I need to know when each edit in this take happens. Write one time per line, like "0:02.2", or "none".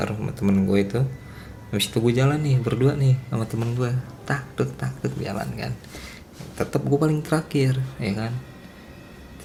none

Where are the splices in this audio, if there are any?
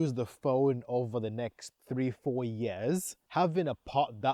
0:03.2

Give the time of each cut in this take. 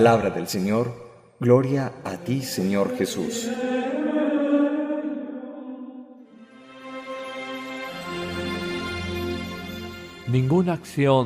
0:02.8

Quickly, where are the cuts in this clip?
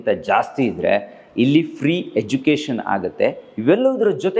none

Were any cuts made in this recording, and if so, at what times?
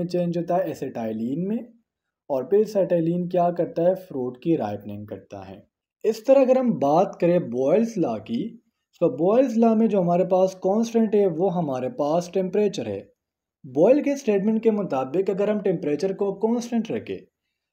0:05.4

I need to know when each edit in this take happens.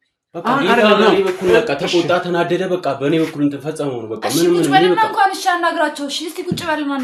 none

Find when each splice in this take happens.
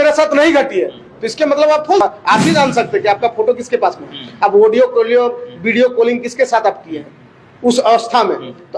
0:02.0

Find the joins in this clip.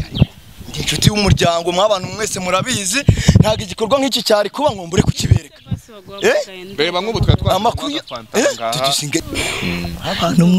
0:09.2

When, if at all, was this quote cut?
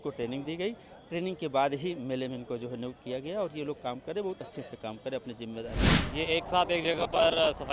0:05.8

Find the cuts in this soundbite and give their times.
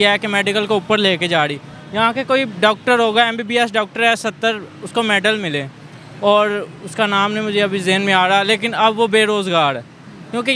none

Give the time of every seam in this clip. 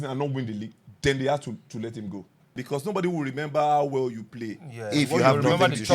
0:02.7

